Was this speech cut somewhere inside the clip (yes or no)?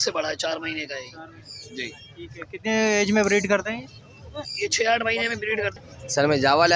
yes